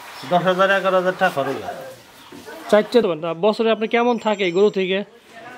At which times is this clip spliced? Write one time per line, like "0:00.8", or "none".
0:03.0